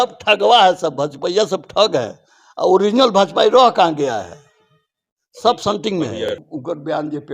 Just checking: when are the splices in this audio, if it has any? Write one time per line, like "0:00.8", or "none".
0:06.4

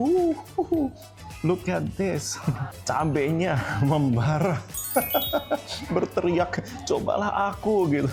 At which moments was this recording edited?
none

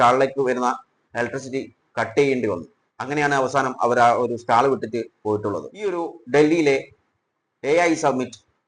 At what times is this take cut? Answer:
none

